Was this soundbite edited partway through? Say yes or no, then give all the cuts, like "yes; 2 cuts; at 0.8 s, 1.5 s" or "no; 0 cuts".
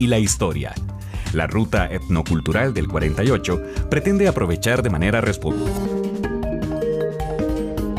no; 0 cuts